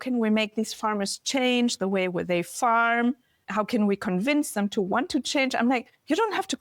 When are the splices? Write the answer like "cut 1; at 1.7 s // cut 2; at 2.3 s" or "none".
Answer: cut 1; at 3.4 s